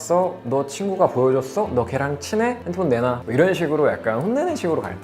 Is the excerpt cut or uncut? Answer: cut